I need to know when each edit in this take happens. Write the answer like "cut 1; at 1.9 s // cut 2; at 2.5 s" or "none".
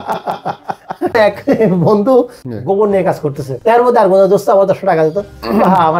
cut 1; at 1.2 s // cut 2; at 2.4 s // cut 3; at 3.5 s